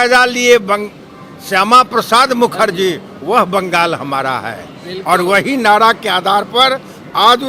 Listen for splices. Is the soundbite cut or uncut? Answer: uncut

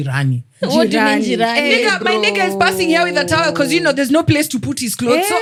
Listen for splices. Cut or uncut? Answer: uncut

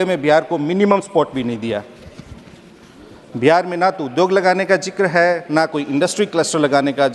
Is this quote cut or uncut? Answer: uncut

